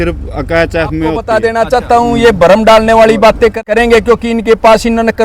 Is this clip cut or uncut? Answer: cut